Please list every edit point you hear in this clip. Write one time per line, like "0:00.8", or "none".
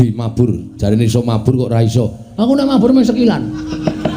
none